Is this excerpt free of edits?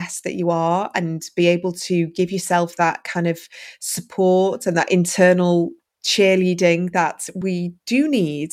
no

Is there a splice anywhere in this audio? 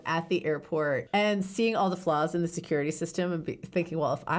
yes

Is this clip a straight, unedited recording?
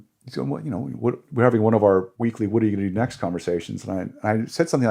no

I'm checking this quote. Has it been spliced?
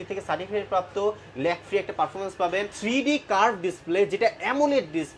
yes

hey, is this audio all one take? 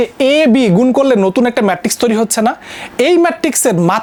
yes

